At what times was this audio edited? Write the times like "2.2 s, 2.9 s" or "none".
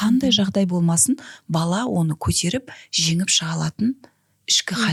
none